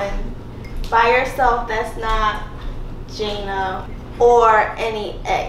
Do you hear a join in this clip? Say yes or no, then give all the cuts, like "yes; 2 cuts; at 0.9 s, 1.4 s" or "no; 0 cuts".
yes; 1 cut; at 3.9 s